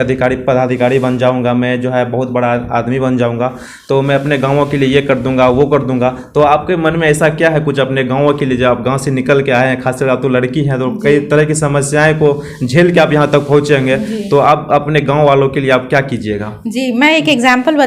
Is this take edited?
no; 0 cuts

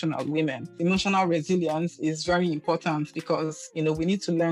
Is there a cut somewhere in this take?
no; 0 cuts

